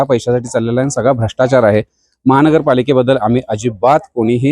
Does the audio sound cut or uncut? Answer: uncut